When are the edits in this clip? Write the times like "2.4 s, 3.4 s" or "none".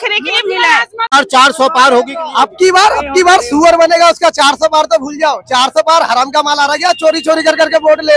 1.1 s